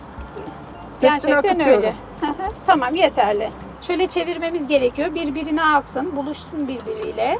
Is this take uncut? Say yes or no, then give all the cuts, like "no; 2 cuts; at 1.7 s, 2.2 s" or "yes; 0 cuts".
no; 1 cut; at 3.7 s